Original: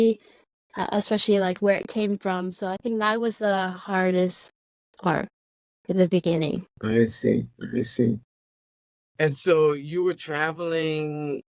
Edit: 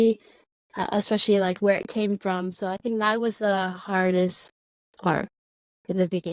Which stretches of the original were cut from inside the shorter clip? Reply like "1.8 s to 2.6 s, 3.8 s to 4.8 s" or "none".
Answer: none